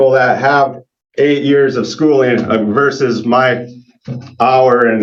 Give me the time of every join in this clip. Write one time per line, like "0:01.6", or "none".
none